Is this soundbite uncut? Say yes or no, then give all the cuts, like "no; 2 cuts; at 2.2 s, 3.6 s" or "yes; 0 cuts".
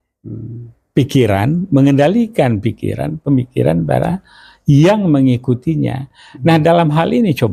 yes; 0 cuts